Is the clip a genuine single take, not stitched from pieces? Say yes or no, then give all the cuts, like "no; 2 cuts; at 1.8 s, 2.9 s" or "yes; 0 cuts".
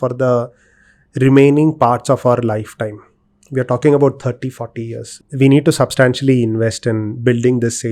no; 1 cut; at 5.2 s